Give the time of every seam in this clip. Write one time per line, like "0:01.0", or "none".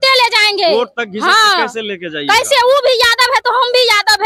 none